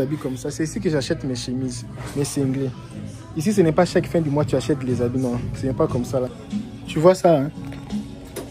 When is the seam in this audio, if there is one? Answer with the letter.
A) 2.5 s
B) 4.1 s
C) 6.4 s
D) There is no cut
C